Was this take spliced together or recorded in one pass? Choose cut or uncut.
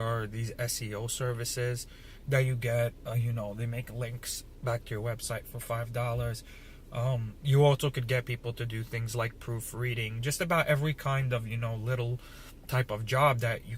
cut